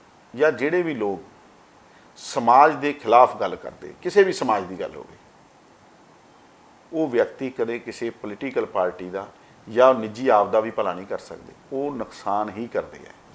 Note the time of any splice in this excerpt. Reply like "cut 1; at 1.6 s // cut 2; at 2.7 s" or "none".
none